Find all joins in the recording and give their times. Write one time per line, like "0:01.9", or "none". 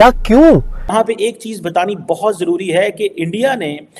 0:00.9